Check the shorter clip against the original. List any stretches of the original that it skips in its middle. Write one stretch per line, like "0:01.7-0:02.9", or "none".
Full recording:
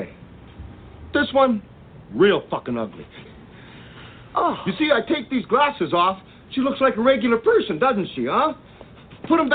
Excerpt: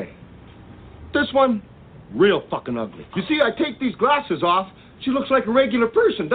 0:03.1-0:04.6